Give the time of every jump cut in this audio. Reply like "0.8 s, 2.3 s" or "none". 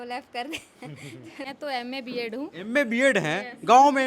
1.5 s